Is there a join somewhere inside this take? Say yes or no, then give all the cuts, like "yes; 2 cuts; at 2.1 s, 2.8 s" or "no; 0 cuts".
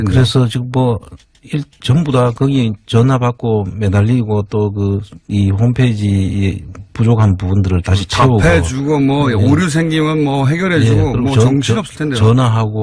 yes; 1 cut; at 6.7 s